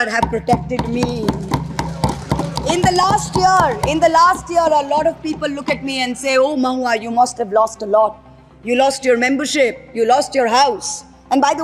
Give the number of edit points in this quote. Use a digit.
0